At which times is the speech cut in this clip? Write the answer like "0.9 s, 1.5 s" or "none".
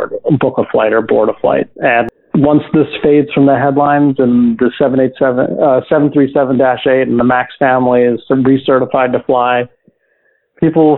2.1 s